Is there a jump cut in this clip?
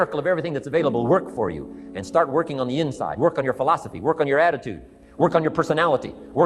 no; 0 cuts

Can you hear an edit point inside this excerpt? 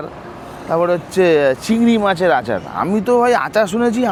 no; 0 cuts

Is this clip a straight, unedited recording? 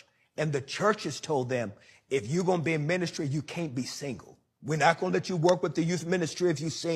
no; 2 cuts; at 4.8 s, 6.0 s

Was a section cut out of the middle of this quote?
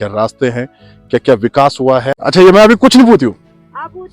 yes; 1 cut; at 2.1 s

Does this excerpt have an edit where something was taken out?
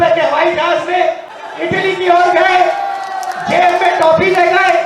yes; 1 cut; at 1.3 s

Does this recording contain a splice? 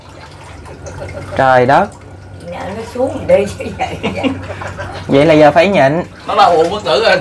no; 0 cuts

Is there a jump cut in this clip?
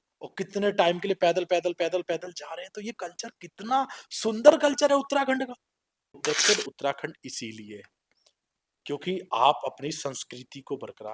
yes; 1 cut; at 6.2 s

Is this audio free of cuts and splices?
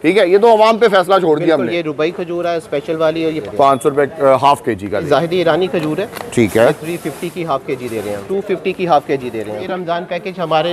no; 5 cuts; at 1.7 s, 3.4 s, 5.1 s, 8.2 s, 9.6 s

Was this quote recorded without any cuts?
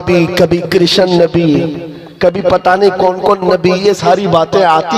yes; 0 cuts

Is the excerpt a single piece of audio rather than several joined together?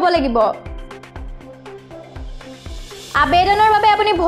yes; 0 cuts

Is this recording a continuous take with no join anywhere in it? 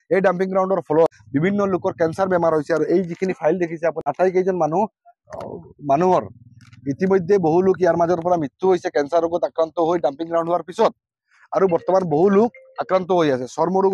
no; 2 cuts; at 1.2 s, 4.1 s

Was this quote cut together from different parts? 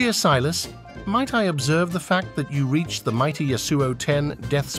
no; 0 cuts

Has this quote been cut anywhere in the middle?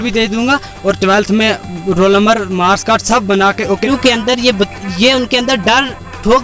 yes; 1 cut; at 3.8 s

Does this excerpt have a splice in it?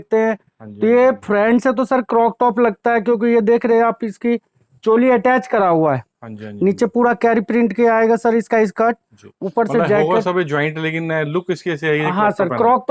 no; 0 cuts

